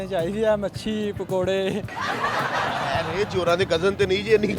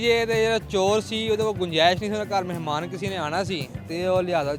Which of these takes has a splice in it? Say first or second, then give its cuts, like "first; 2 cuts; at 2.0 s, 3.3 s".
first; 1 cut; at 2.8 s